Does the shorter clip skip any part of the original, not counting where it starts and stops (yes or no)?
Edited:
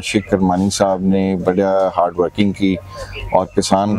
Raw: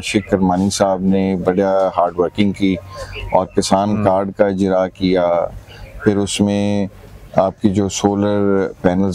no